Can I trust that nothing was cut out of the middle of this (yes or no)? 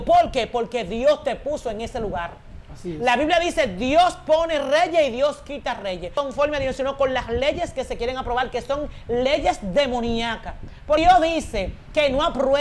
no